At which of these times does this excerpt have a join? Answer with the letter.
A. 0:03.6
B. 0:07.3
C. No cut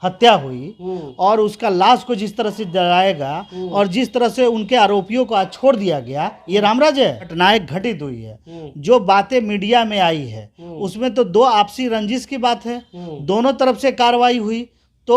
B